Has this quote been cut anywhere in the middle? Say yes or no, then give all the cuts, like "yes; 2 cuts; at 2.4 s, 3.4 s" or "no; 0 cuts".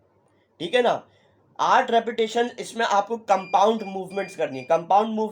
no; 0 cuts